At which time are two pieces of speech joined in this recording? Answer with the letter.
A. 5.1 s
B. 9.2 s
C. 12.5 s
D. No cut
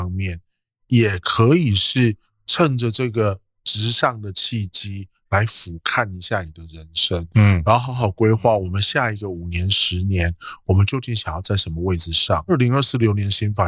C